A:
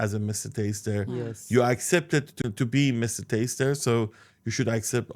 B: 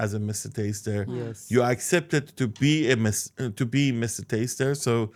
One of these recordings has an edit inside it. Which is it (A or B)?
A